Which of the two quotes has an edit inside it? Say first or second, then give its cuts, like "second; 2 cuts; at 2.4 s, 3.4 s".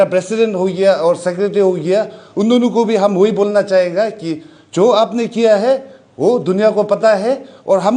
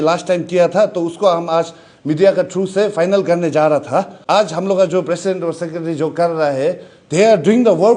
second; 1 cut; at 4.2 s